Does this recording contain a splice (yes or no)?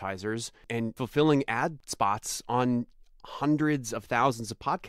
yes